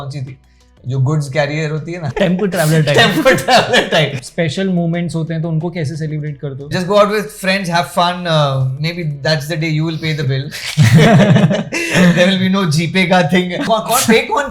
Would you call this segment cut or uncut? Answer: cut